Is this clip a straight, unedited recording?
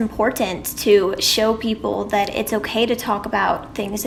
yes; 0 cuts

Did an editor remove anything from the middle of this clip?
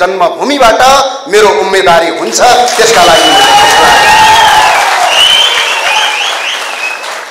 no; 0 cuts

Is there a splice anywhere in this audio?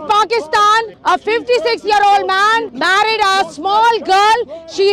yes; 2 cuts; at 0.9 s, 2.7 s

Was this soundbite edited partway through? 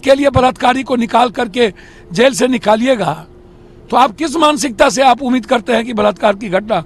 no; 0 cuts

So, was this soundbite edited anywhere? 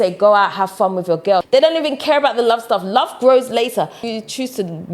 yes; 2 cuts; at 1.5 s, 4.0 s

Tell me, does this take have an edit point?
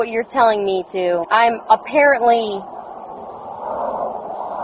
yes; 1 cut; at 1.2 s

